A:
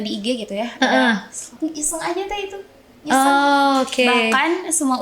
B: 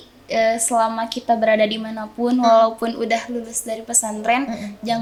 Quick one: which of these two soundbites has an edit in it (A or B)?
A